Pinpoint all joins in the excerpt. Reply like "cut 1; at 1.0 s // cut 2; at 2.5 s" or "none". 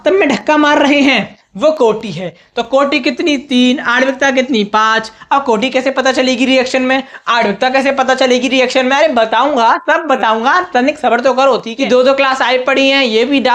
cut 1; at 11.7 s